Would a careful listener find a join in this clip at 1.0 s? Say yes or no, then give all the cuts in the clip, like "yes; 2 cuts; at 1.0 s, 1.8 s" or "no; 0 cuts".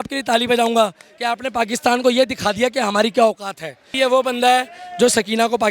no; 1 cut; at 3.8 s